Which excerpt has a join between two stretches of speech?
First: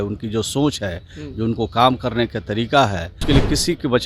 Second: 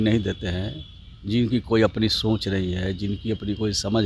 first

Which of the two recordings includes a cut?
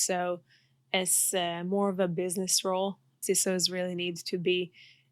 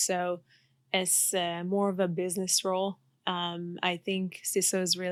first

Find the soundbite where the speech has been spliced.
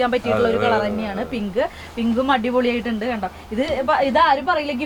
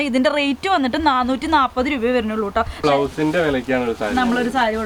second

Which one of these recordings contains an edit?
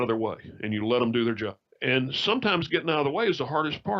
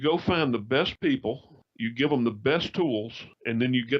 second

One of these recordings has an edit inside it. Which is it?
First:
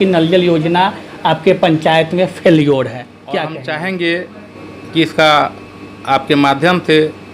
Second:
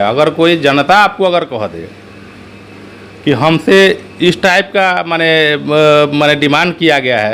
first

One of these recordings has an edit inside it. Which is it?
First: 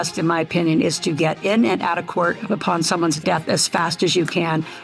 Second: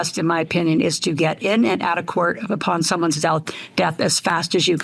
first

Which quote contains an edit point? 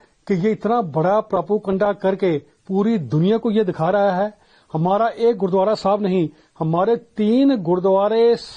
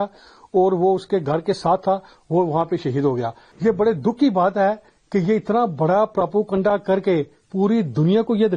second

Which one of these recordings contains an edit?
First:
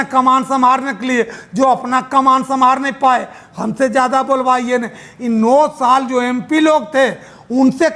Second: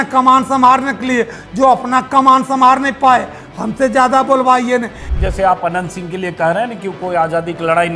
second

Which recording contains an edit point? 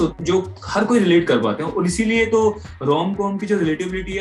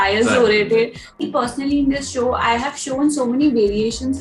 second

